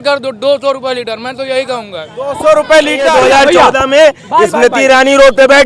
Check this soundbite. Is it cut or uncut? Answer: cut